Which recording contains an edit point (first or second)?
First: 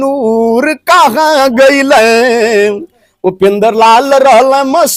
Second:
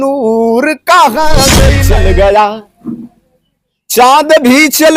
second